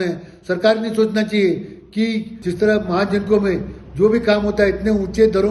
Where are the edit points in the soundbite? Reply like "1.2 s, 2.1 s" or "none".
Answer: 2.4 s